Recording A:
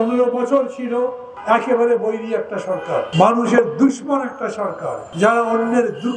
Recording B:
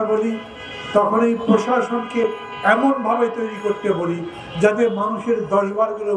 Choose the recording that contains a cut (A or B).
A